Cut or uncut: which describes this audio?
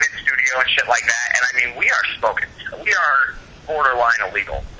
uncut